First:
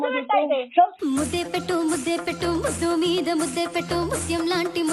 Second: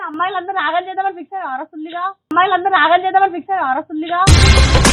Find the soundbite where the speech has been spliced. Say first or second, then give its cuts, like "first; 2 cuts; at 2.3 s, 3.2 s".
first; 1 cut; at 0.9 s